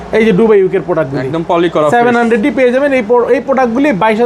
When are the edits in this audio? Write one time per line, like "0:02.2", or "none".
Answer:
none